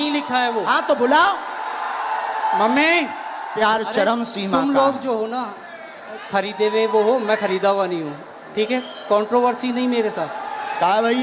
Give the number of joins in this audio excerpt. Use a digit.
1